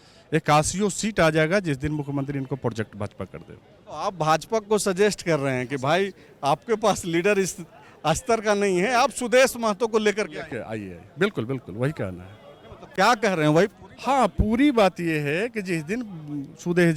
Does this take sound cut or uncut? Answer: uncut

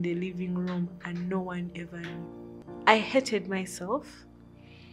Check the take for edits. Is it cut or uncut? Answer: cut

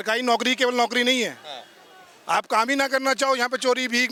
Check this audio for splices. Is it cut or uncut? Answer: uncut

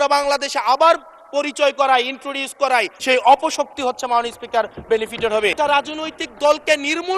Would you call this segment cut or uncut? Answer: cut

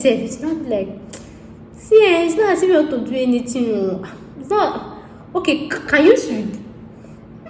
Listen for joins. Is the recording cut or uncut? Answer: uncut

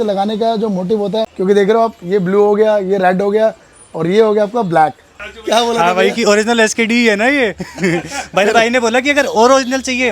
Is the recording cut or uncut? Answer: cut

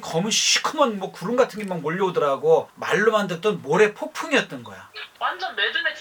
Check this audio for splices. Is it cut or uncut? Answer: uncut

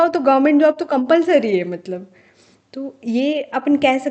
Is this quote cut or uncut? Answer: uncut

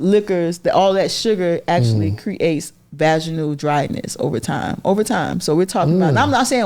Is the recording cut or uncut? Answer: uncut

